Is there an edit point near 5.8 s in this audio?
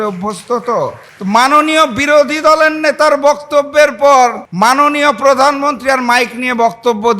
no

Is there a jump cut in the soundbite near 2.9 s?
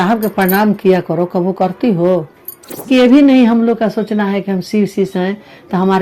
yes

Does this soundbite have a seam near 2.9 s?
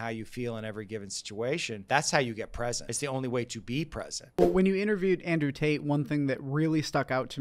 yes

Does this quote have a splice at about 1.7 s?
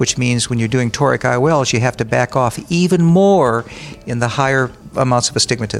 no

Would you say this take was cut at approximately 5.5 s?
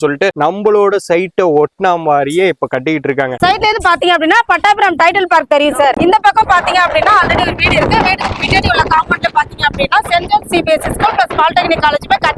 no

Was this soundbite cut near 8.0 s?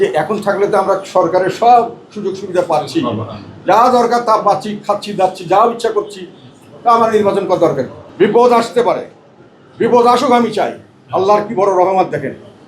yes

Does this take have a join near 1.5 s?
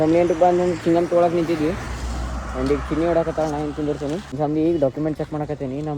no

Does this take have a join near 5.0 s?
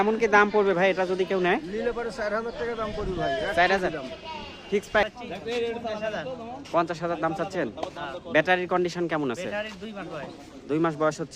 yes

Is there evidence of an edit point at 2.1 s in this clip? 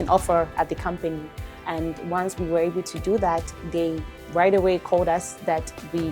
no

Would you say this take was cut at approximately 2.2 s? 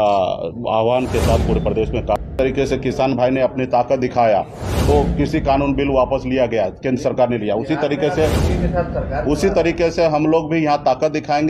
yes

